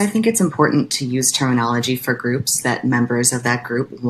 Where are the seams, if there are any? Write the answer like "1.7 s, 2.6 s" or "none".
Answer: 3.0 s

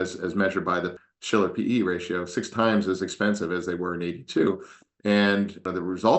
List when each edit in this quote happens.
0.9 s

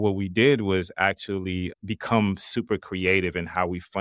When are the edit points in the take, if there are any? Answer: none

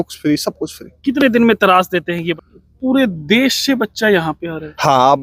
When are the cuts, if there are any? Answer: 2.4 s

